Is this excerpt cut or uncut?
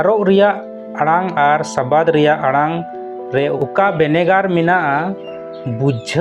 uncut